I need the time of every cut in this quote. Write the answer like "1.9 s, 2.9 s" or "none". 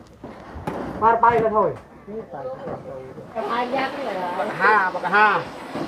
3.4 s